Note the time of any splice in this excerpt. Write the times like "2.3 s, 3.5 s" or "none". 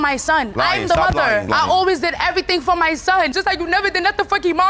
none